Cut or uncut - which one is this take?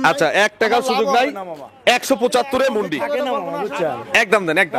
cut